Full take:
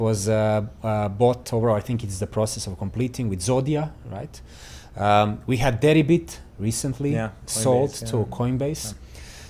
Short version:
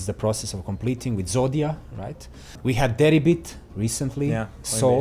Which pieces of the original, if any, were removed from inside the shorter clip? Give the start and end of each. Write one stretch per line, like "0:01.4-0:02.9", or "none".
0:04.7-0:05.4